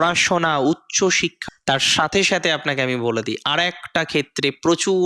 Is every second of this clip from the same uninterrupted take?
no; 1 cut; at 1.4 s

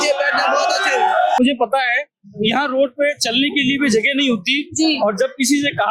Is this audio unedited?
no; 1 cut; at 1.4 s

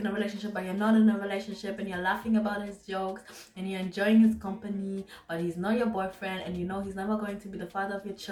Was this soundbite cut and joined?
no; 0 cuts

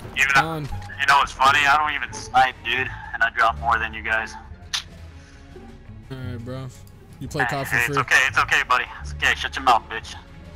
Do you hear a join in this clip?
no; 0 cuts

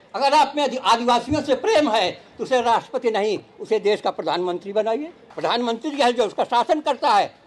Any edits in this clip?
yes; 1 cut; at 5.2 s

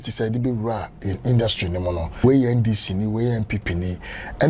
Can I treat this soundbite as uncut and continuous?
no; 1 cut; at 2.2 s

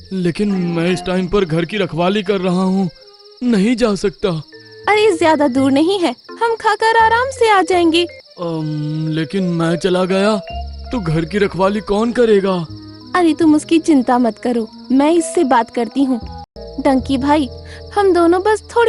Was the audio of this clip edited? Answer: yes; 2 cuts; at 8.2 s, 16.6 s

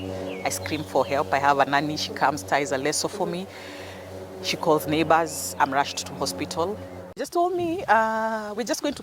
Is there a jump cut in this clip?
yes; 1 cut; at 7.2 s

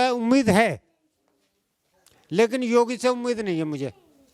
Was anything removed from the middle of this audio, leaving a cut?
no; 0 cuts

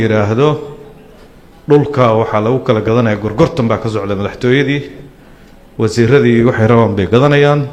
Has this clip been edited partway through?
no; 0 cuts

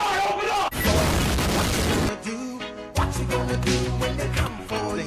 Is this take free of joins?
yes; 0 cuts

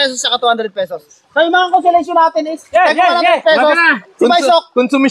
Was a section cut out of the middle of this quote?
no; 0 cuts

